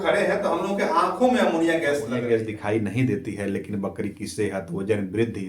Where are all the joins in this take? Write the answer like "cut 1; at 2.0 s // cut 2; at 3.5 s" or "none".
cut 1; at 2.2 s